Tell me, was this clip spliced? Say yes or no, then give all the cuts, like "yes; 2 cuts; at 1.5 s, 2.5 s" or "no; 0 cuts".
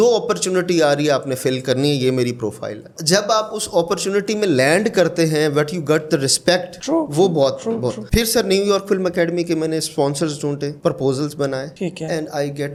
no; 0 cuts